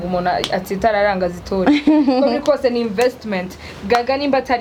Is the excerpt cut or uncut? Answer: uncut